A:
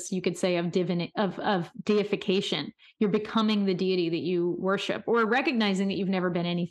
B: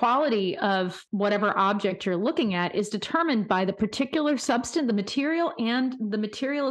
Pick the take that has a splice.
B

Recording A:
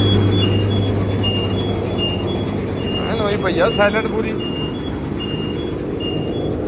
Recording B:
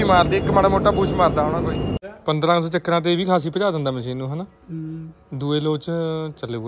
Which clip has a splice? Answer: B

